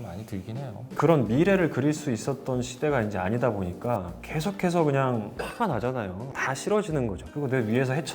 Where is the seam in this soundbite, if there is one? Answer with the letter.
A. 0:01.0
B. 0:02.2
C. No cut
A